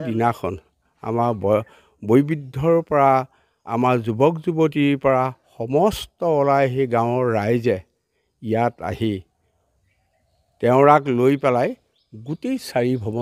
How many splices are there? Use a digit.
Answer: 0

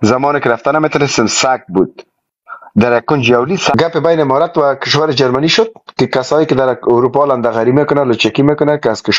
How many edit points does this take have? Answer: 1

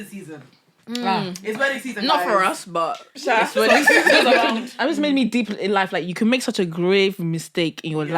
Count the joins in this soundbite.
1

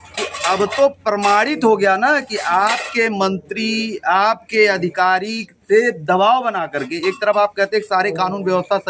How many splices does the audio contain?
0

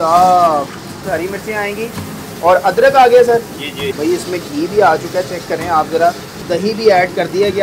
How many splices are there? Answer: 3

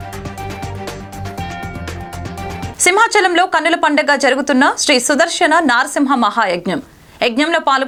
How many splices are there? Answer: 0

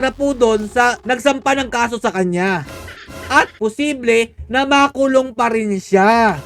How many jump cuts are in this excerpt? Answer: 1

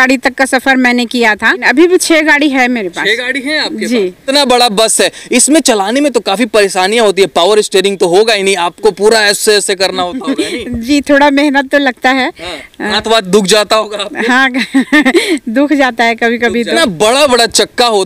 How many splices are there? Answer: 3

